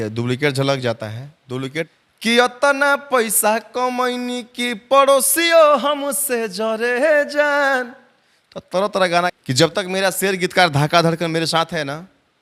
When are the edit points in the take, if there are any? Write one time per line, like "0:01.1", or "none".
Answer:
0:01.9
0:09.3

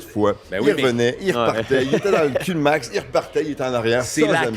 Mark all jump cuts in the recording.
none

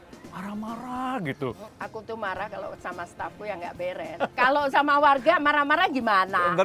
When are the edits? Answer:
0:01.7
0:04.1

